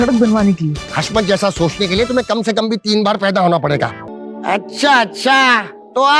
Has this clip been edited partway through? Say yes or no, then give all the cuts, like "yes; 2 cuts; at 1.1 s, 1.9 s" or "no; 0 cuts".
yes; 1 cut; at 4.1 s